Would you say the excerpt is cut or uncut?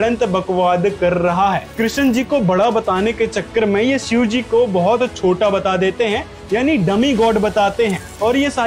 cut